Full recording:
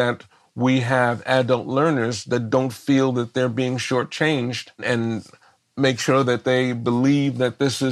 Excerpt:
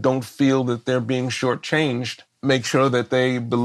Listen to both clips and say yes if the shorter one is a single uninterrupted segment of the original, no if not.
no